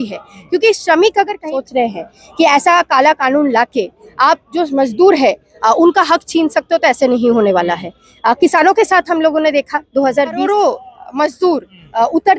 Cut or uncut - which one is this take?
cut